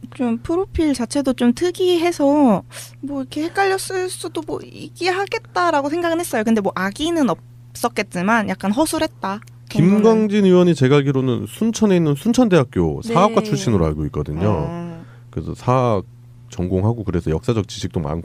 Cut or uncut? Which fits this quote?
uncut